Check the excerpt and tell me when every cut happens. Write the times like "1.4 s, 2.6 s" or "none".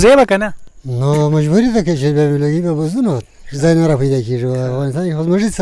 none